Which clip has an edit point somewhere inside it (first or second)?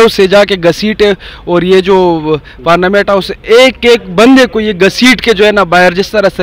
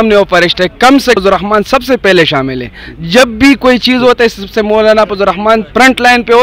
second